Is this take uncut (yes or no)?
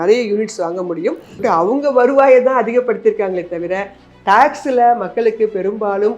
no